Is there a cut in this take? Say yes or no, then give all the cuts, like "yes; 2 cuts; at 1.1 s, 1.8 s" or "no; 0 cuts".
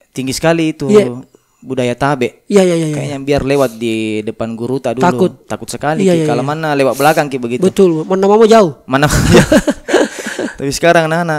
no; 0 cuts